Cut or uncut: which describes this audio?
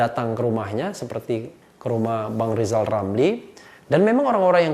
uncut